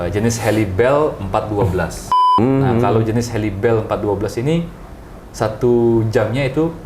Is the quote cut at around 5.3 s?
no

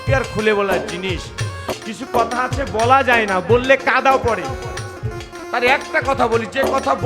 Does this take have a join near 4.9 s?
yes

